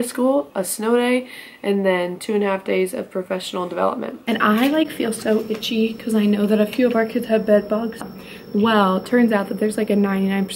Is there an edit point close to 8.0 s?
yes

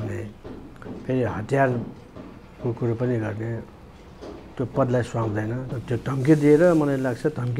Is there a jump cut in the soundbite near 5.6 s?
yes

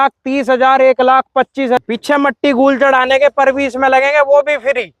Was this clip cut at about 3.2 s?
no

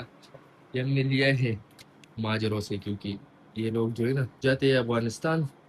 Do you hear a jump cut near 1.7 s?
no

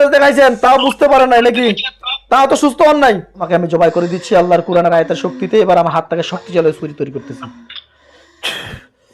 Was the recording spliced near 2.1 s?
no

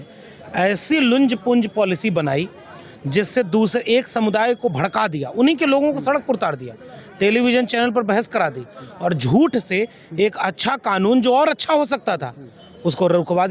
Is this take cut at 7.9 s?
no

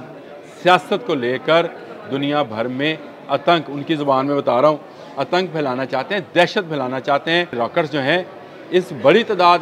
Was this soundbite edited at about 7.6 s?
yes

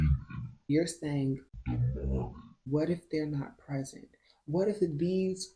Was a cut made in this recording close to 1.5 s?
yes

